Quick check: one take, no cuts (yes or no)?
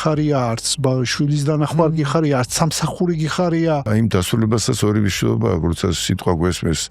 no